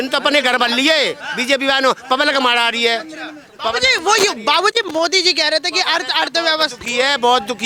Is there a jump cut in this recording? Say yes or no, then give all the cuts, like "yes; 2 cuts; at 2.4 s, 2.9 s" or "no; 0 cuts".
no; 0 cuts